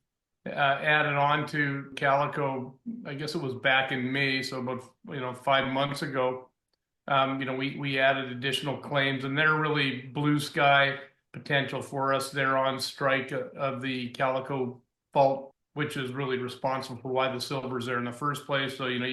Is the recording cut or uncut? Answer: uncut